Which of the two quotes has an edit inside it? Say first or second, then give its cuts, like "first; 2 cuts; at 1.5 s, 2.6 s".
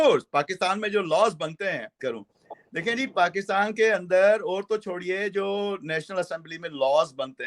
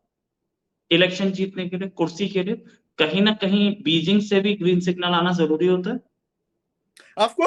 first; 1 cut; at 2.0 s